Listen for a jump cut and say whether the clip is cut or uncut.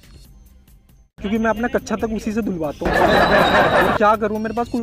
cut